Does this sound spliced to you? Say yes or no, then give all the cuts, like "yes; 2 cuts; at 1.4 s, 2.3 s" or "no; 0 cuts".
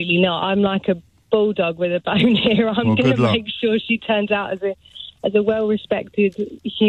no; 0 cuts